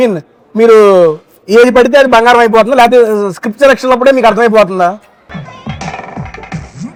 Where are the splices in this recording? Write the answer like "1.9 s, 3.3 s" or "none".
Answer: none